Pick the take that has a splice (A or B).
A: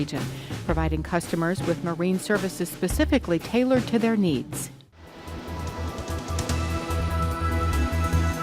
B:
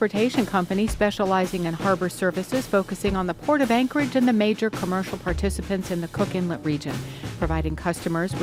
A